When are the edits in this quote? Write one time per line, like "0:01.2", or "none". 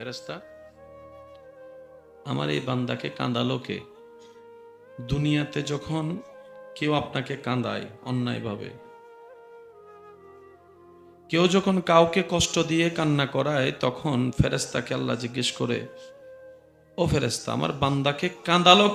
none